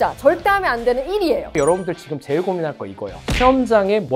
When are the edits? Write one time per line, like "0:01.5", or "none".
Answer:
0:01.5